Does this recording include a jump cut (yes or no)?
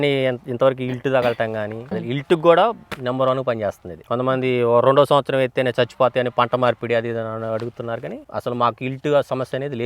yes